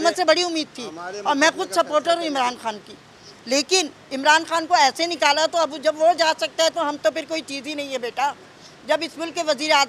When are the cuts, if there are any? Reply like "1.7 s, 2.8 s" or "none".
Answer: none